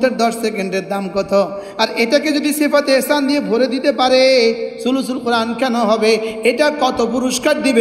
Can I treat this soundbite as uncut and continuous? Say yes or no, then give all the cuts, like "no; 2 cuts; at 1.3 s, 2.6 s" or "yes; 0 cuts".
yes; 0 cuts